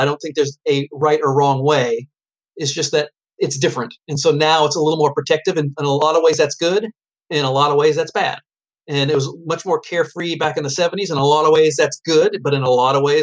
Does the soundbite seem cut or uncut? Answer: uncut